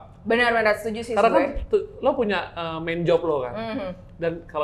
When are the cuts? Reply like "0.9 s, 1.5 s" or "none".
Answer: none

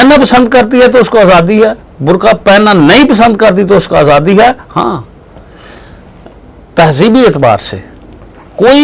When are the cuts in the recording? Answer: none

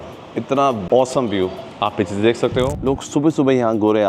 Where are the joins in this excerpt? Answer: 0.8 s, 2.7 s

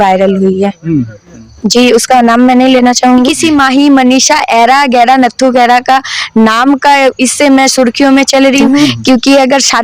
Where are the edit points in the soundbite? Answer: 3.3 s, 8.9 s

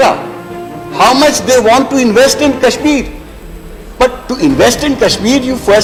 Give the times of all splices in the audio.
none

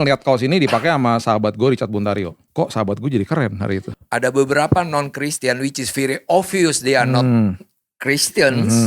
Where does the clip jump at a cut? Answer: 2.4 s, 3.9 s

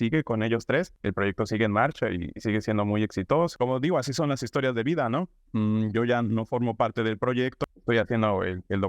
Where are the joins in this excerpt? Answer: 3.5 s, 7.6 s

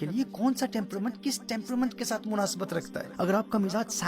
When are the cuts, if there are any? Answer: 3.0 s

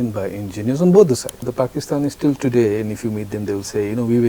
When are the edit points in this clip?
1.5 s

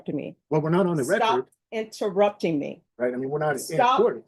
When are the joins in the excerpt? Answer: 2.8 s

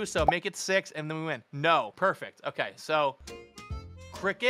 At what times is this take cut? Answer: 1.9 s

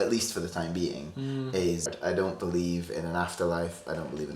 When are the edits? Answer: 1.9 s

